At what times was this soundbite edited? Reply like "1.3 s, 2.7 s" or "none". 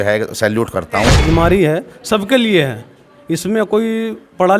1.2 s